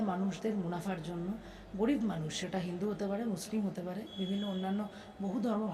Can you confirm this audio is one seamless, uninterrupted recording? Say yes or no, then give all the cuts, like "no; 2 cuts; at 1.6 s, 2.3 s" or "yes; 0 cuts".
yes; 0 cuts